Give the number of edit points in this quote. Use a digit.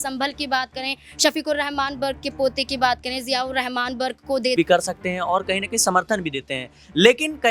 1